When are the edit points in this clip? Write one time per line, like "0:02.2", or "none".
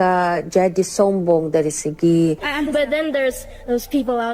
0:02.5